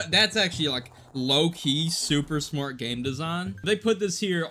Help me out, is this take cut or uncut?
cut